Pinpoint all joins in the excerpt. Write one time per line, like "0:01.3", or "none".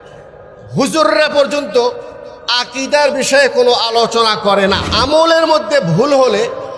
0:05.1